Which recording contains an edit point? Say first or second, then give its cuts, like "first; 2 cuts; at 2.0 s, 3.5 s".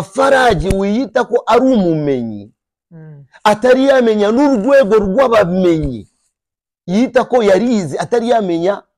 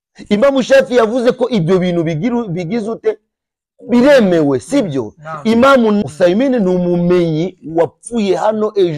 second; 1 cut; at 6.0 s